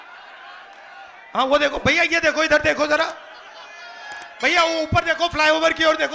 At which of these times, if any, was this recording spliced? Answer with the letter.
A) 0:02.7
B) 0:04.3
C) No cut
C